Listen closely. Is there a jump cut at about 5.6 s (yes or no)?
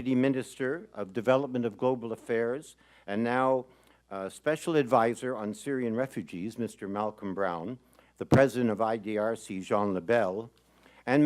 no